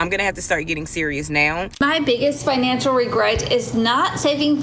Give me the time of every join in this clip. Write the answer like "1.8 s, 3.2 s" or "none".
1.7 s